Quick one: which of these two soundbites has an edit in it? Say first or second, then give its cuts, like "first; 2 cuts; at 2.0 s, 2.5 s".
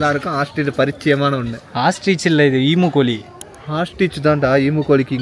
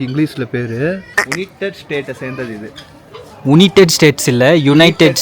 second; 1 cut; at 1.1 s